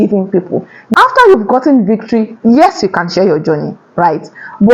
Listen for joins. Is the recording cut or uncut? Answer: cut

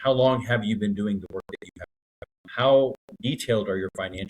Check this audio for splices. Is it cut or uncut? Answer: cut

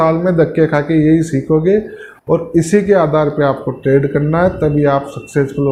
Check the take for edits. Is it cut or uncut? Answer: uncut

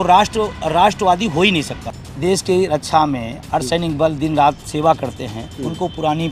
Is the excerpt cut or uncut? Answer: cut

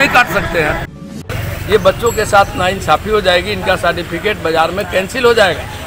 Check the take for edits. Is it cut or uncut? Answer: cut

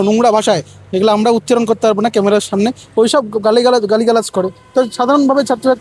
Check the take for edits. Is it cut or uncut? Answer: uncut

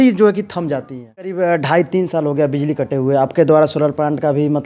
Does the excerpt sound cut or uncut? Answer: cut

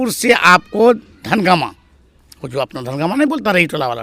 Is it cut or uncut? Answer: uncut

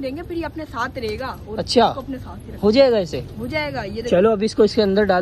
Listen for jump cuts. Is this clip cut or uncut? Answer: uncut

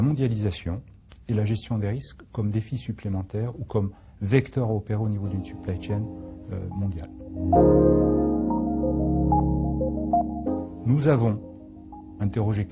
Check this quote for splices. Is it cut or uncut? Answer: cut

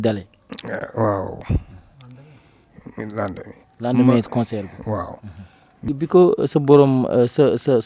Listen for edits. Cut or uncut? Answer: cut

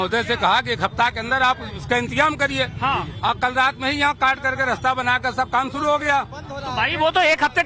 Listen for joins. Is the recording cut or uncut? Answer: cut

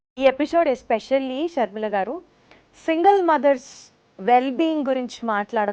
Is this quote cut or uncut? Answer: uncut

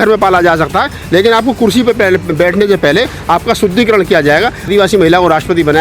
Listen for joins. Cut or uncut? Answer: cut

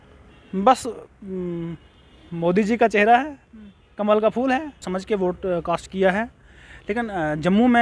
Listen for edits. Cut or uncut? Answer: cut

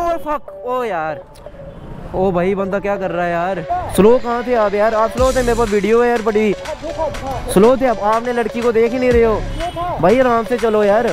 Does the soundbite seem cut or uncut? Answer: cut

